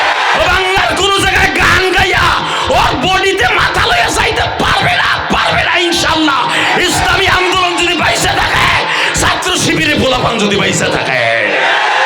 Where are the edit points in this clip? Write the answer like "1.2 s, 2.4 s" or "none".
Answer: none